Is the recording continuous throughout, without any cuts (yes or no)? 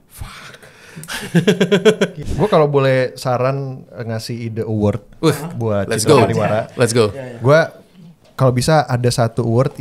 no